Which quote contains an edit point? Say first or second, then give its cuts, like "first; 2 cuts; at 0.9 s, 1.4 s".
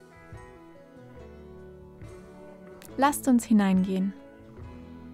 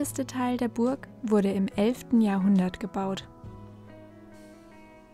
first; 2 cuts; at 3.0 s, 4.1 s